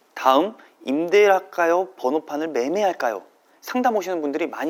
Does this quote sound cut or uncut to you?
uncut